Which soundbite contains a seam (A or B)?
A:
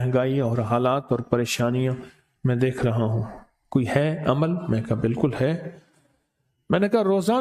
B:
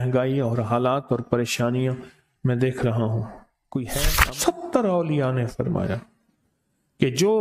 B